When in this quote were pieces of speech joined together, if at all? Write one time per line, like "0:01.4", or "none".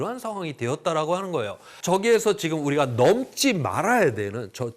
0:01.7